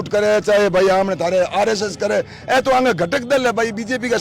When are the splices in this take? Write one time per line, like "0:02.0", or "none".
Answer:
none